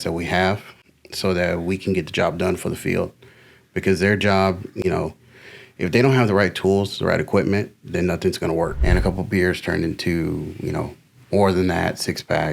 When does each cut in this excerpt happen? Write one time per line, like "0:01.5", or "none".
0:08.8